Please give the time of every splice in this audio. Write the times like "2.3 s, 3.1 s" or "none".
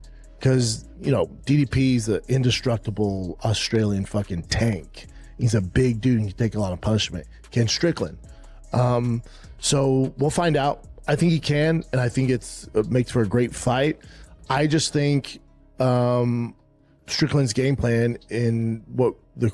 none